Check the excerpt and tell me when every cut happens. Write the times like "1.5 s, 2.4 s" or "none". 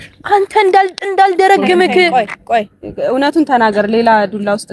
none